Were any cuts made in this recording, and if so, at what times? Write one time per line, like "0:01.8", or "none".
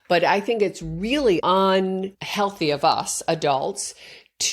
0:01.4
0:02.2